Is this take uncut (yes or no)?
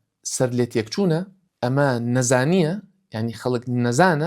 no